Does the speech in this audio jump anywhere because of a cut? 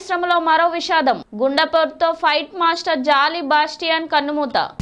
no; 0 cuts

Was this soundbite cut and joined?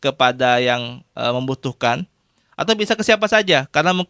no; 0 cuts

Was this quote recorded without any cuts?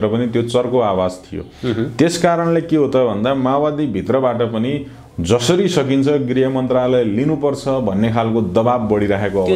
yes; 0 cuts

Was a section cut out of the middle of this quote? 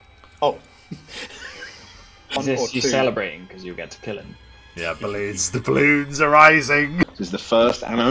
yes; 2 cuts; at 2.4 s, 7.0 s

